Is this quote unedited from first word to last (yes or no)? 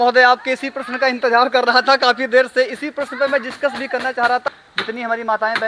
no